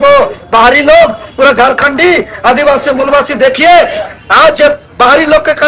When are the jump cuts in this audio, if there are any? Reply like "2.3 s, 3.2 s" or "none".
none

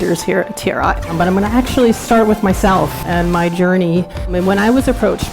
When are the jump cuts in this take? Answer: 1.1 s, 3.0 s, 4.3 s

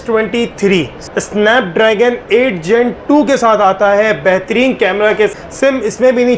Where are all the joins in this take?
1.0 s, 5.3 s

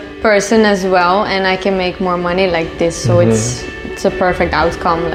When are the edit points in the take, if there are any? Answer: none

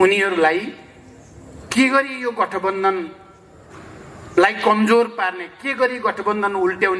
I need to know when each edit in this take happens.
none

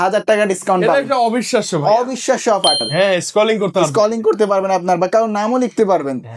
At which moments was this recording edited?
2.8 s

